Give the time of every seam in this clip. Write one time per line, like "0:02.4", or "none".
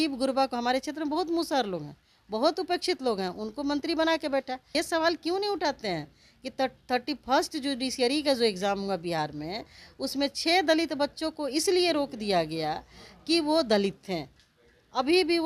0:04.6